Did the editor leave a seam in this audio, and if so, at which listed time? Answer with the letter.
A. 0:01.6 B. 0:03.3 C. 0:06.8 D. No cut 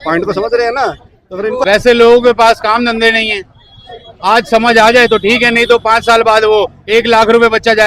A